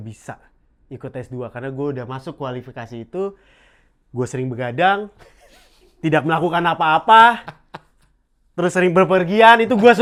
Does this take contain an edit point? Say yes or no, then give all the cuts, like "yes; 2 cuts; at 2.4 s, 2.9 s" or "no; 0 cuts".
no; 0 cuts